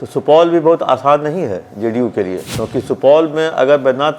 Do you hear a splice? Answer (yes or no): yes